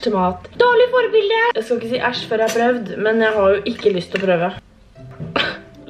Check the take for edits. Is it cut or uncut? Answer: uncut